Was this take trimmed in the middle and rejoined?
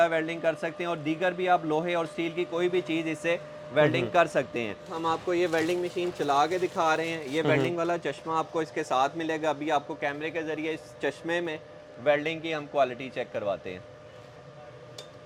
no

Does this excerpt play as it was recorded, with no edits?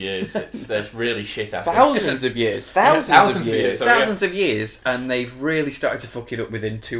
yes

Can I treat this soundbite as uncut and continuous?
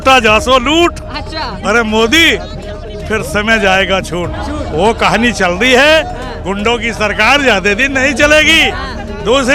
yes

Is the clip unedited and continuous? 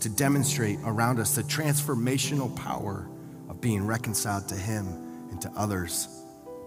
yes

